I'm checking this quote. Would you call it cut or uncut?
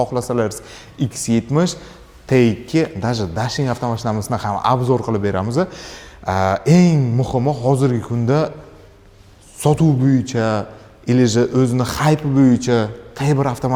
uncut